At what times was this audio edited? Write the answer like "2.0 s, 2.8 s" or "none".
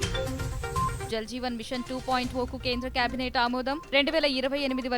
1.0 s

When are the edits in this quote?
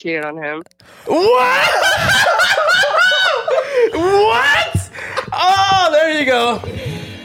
none

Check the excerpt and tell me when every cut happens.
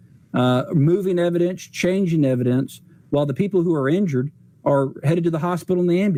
none

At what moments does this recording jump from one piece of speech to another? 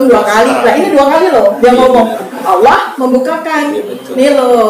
2.4 s

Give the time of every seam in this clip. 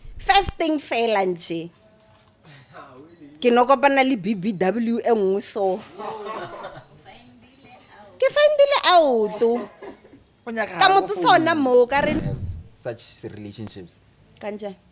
12.2 s

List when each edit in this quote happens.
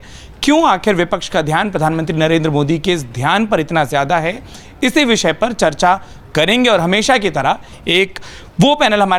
none

